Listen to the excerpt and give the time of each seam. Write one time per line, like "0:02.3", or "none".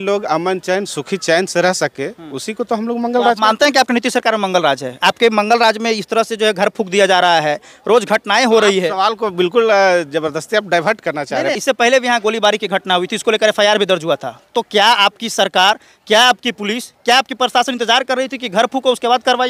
0:11.6